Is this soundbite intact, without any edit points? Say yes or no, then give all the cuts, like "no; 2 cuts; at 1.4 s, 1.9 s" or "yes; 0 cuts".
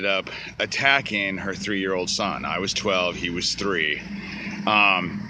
yes; 0 cuts